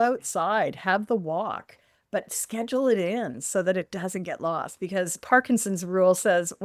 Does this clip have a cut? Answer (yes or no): no